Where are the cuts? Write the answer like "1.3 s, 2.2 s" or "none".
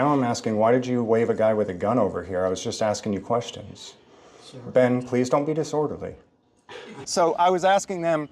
7.1 s